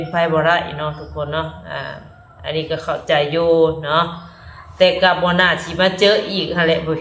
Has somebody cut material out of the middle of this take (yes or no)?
no